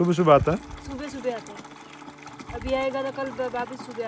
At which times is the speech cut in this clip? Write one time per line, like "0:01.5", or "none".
none